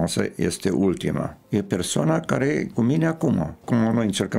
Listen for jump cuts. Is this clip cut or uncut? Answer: cut